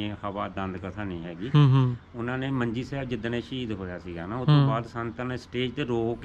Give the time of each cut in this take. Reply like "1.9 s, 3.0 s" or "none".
none